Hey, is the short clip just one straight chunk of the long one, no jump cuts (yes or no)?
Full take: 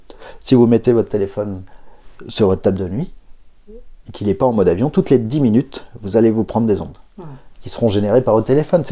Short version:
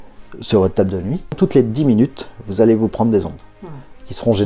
no